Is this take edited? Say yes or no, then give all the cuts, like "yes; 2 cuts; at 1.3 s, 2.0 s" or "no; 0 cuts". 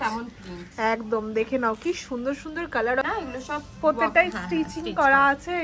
yes; 1 cut; at 3.0 s